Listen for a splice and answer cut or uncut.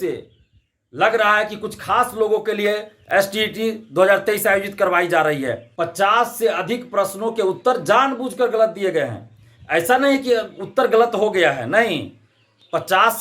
cut